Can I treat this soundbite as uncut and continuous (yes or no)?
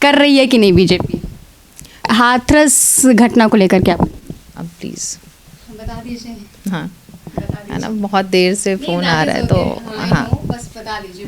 no